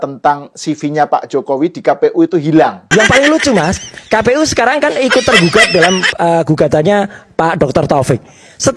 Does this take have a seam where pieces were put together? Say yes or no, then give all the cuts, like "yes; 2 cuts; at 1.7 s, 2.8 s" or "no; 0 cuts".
no; 0 cuts